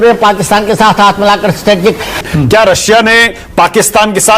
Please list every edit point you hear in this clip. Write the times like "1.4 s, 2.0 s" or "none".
2.2 s